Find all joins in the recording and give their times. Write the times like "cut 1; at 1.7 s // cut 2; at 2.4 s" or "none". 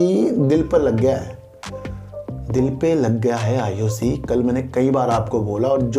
none